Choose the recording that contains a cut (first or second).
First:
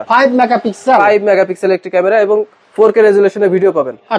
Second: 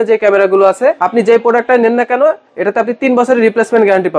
second